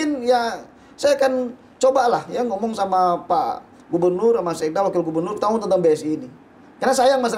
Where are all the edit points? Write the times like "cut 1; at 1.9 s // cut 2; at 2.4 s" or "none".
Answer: none